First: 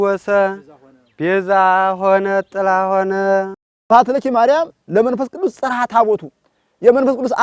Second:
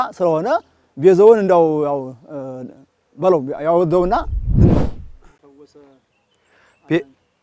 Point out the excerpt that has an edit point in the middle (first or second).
first